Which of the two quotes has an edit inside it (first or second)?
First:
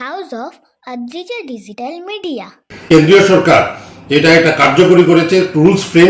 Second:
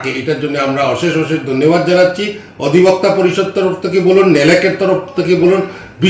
first